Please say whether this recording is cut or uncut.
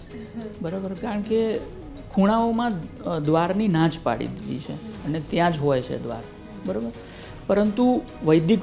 uncut